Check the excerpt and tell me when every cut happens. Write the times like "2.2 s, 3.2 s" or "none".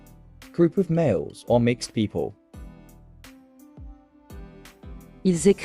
2.3 s, 4.6 s